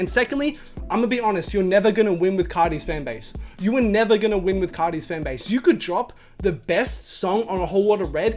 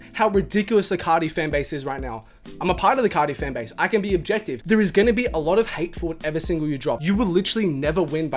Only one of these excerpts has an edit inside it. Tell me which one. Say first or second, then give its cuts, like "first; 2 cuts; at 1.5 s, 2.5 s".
second; 2 cuts; at 4.5 s, 7.0 s